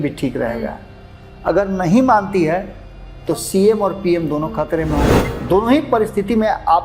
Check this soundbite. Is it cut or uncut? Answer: cut